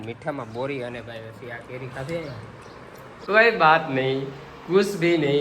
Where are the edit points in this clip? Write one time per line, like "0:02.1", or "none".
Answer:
0:03.2